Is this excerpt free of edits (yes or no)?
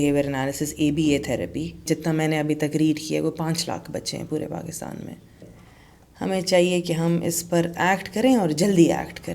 no